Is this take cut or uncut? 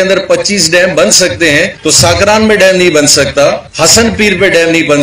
cut